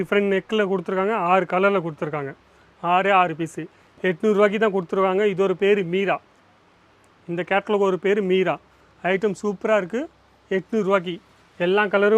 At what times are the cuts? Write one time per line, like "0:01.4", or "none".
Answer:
none